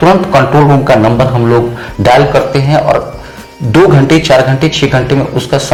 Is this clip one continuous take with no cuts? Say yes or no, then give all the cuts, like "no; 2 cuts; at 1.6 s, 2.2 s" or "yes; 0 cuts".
yes; 0 cuts